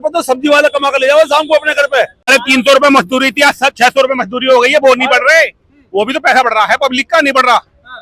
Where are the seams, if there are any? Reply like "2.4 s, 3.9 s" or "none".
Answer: 2.3 s

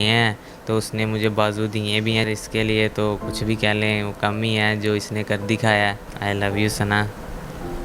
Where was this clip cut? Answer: 2.2 s, 6.1 s

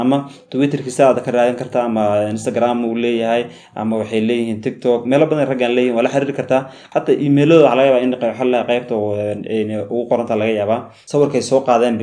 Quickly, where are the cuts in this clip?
11.0 s

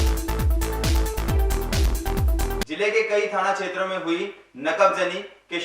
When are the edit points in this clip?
none

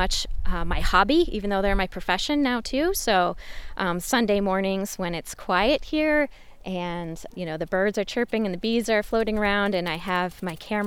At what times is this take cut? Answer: none

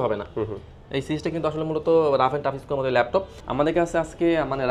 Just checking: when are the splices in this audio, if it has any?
3.4 s

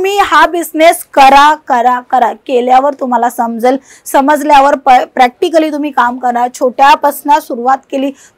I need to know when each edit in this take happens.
none

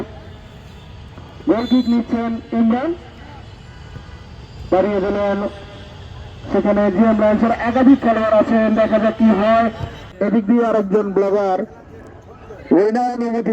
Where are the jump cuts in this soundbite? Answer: 10.1 s

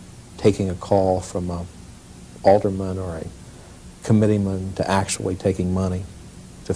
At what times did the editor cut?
3.6 s

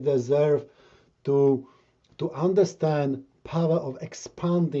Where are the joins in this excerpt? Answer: none

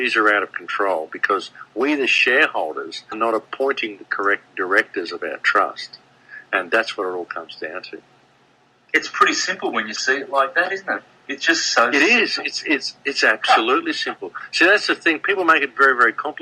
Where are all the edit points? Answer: 3.1 s

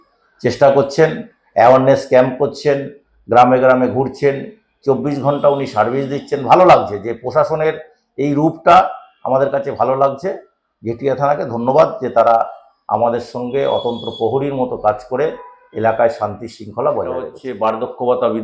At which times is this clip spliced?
17.5 s

